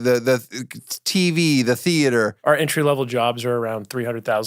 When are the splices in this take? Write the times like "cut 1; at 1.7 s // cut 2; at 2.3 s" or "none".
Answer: cut 1; at 2.3 s